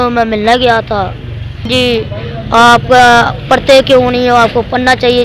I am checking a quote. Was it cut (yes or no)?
yes